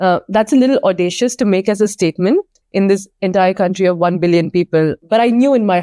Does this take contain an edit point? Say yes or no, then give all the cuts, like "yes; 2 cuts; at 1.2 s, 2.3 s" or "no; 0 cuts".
yes; 2 cuts; at 2.6 s, 5.0 s